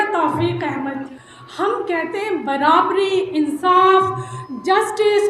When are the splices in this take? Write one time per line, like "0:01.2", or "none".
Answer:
0:01.2

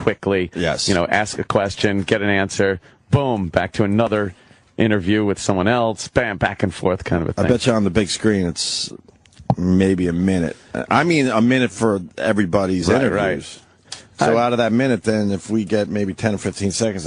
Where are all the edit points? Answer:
0:08.8

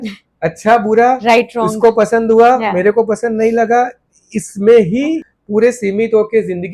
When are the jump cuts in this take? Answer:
0:05.3

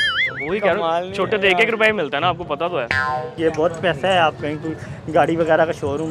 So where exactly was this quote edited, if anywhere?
0:03.4

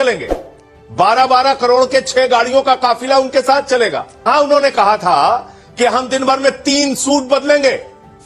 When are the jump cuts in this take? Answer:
0:04.3

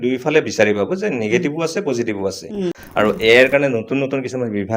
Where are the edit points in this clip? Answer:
0:02.8

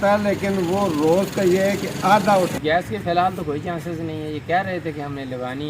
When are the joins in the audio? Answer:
0:02.5

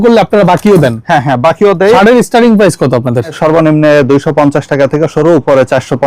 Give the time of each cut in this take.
0:02.0
0:03.4

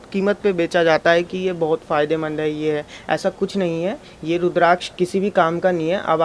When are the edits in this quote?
none

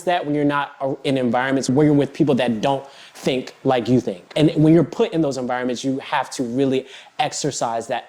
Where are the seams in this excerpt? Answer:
0:01.7
0:04.2

